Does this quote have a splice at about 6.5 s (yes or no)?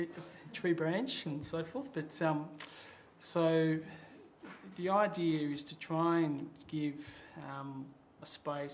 no